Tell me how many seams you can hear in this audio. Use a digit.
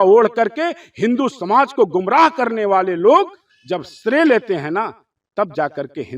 0